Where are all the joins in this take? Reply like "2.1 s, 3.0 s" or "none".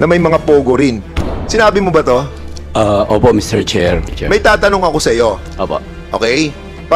1.1 s, 4.1 s